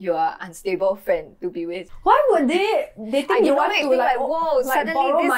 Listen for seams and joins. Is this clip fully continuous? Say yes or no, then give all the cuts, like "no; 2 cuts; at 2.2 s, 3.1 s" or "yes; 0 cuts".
no; 1 cut; at 1.8 s